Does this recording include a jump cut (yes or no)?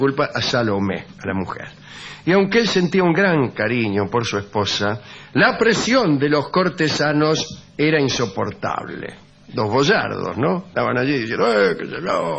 yes